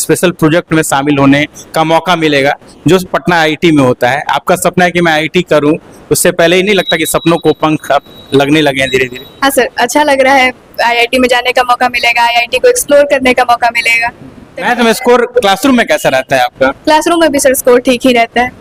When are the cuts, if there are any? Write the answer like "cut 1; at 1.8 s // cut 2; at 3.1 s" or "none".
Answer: none